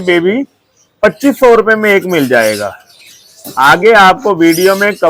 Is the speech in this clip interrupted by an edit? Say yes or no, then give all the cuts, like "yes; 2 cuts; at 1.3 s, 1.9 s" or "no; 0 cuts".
no; 0 cuts